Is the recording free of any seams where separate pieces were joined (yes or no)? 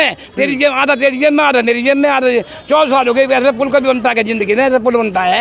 yes